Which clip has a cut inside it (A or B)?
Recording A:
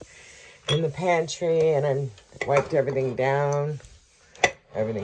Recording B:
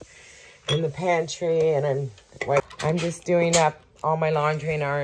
B